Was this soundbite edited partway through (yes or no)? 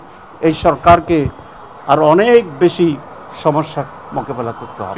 no